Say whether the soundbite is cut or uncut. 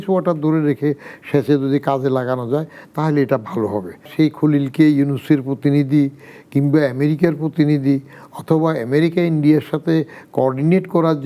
cut